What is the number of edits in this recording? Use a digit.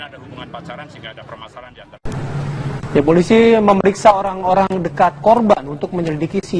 1